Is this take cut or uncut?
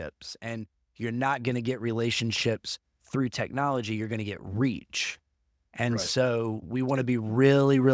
uncut